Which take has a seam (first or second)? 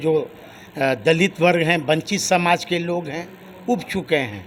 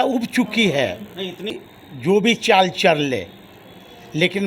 second